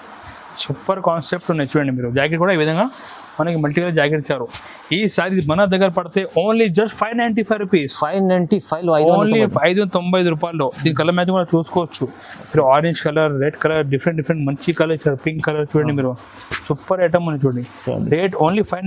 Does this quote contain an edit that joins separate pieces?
no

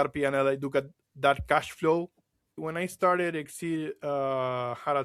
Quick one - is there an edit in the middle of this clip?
yes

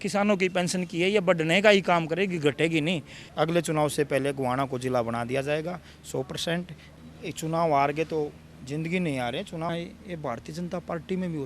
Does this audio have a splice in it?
yes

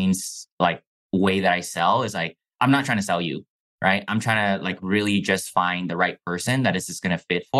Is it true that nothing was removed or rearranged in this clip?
yes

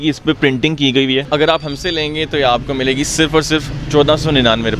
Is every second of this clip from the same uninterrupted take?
no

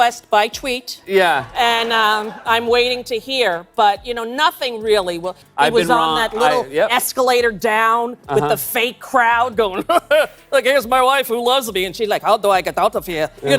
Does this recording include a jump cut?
yes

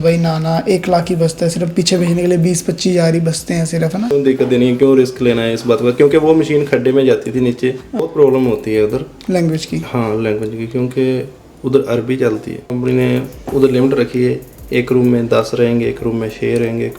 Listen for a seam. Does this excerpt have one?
yes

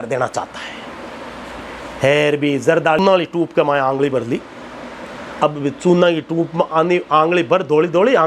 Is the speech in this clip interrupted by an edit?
yes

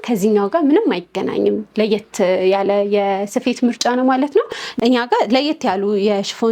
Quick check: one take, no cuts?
no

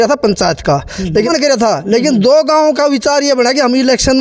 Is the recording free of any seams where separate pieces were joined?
no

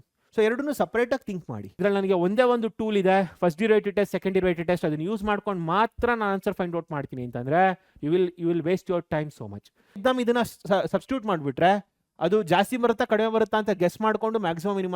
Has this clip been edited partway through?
yes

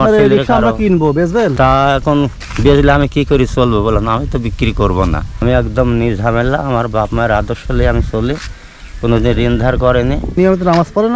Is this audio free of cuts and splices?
no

